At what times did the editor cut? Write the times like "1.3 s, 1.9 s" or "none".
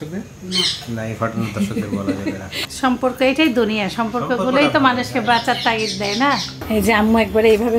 2.6 s, 6.6 s

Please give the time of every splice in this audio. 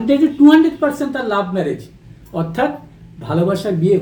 none

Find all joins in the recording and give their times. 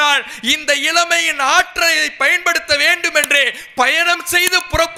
none

